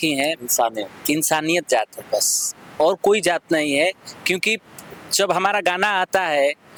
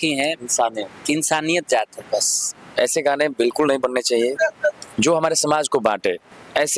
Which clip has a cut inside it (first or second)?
second